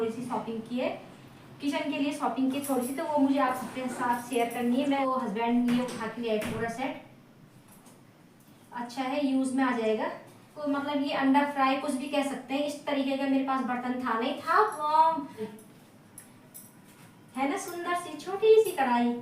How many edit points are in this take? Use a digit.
3